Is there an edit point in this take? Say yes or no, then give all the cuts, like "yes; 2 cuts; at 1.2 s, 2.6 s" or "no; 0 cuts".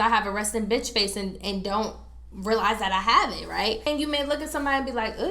yes; 1 cut; at 3.9 s